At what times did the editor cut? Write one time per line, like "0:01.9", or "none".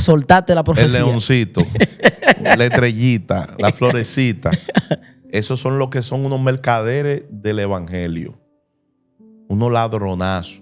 none